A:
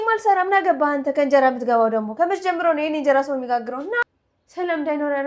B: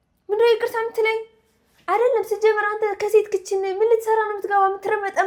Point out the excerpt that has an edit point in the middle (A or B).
A